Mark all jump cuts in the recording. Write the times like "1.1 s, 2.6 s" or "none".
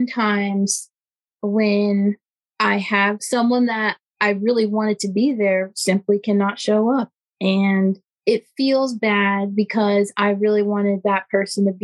3.2 s, 8.1 s